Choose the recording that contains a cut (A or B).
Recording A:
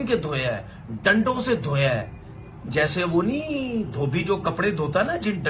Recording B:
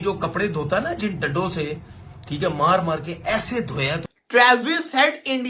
B